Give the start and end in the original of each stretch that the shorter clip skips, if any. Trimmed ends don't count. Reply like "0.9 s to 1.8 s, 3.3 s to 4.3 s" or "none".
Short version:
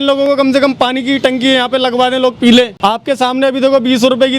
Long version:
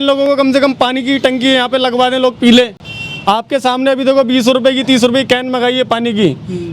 2.7 s to 3.2 s